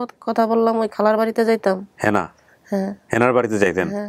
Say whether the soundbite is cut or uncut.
uncut